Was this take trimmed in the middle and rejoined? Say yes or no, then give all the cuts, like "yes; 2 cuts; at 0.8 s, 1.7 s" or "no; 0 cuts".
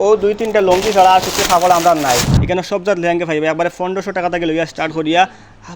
yes; 1 cut; at 2.3 s